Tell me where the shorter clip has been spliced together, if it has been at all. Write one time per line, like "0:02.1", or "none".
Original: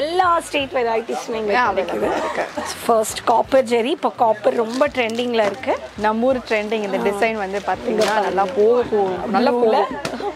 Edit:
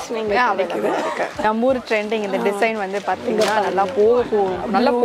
0:01.3